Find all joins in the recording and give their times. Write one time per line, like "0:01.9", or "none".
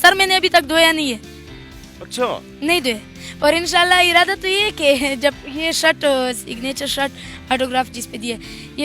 none